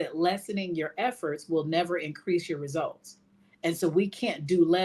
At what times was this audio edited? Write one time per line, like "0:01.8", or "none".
none